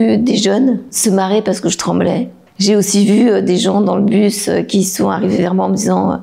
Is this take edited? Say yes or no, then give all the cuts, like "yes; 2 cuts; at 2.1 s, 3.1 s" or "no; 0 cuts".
yes; 2 cuts; at 1.0 s, 2.4 s